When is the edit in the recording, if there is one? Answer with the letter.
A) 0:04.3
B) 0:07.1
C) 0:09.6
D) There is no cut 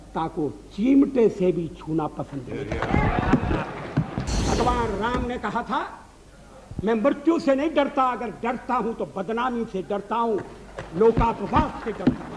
A